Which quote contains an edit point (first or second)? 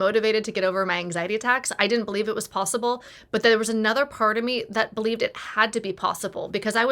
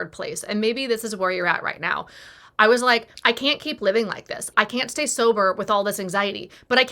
second